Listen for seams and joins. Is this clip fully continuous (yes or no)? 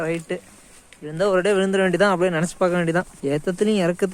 no